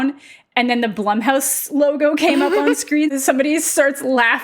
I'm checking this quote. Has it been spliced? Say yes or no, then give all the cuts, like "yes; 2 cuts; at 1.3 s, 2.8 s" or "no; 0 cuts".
yes; 1 cut; at 3.1 s